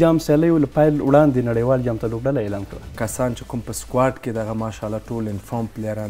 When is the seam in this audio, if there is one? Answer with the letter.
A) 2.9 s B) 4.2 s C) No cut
A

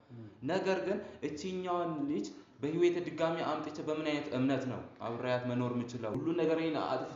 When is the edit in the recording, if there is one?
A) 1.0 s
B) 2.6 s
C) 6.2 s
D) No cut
C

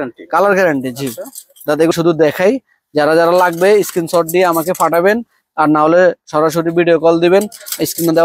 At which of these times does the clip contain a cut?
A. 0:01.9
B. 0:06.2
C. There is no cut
A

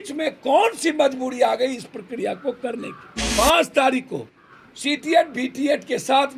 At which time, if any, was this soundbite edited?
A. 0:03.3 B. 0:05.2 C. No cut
A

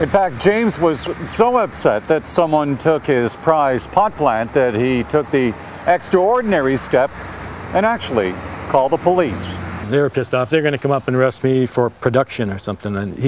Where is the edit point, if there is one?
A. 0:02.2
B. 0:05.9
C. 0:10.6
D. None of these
C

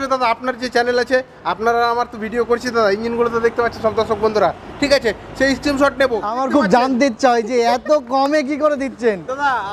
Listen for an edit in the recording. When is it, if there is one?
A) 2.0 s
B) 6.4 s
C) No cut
B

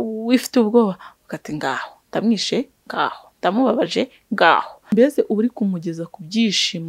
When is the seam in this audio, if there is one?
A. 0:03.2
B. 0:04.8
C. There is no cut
B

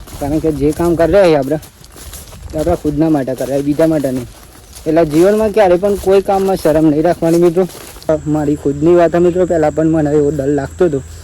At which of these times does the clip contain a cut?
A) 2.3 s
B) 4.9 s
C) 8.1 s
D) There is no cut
C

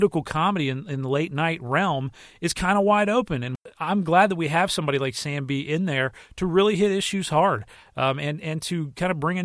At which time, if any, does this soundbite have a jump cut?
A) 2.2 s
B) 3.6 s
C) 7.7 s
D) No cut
B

